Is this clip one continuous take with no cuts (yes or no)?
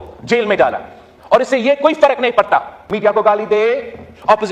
no